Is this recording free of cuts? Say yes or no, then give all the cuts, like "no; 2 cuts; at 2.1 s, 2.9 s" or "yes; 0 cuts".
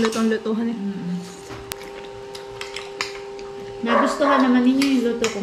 no; 1 cut; at 1.7 s